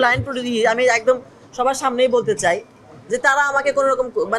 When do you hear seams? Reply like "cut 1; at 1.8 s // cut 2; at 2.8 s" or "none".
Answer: none